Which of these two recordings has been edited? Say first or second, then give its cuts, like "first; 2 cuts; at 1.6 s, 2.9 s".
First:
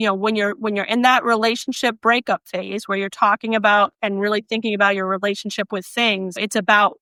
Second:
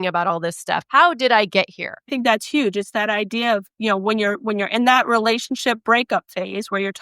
second; 2 cuts; at 0.8 s, 2.1 s